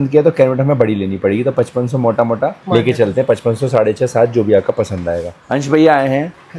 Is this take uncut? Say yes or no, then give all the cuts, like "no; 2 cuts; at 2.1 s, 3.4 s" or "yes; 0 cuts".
no; 1 cut; at 5.4 s